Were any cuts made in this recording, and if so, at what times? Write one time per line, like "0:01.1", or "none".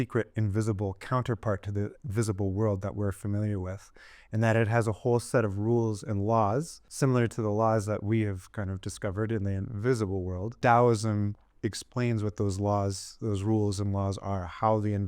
0:06.8
0:10.6

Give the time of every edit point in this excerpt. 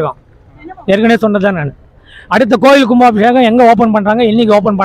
none

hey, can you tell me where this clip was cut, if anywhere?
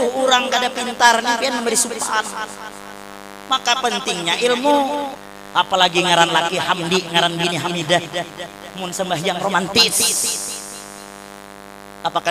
0:05.2

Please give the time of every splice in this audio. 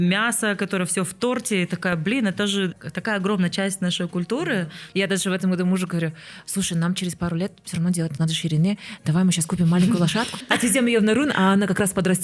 0:02.8
0:04.8
0:10.3

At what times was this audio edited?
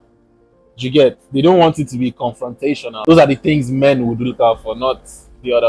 0:02.9

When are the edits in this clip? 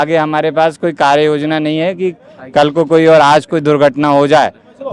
none

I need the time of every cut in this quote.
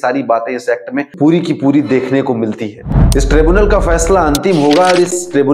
0:02.8

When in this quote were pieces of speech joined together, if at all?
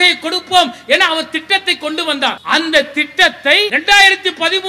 0:02.4
0:03.8

